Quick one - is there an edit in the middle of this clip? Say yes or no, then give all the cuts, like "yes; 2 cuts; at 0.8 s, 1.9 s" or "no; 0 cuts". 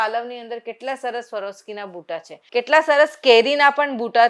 yes; 1 cut; at 2.3 s